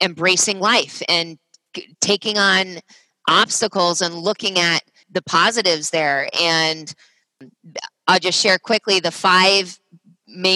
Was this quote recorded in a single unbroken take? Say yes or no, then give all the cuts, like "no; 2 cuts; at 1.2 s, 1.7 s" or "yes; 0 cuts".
no; 2 cuts; at 5.0 s, 7.4 s